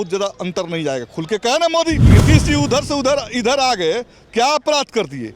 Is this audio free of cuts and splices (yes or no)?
no